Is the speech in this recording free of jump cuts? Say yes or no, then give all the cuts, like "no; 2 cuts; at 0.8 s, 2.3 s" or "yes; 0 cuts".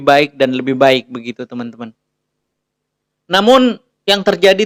yes; 0 cuts